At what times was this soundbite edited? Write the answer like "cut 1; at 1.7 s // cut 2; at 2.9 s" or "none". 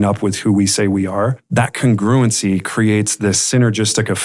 cut 1; at 1.4 s